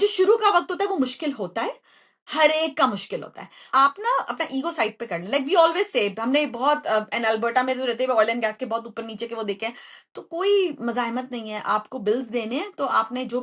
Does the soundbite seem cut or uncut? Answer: cut